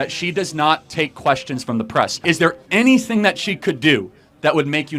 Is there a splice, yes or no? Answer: yes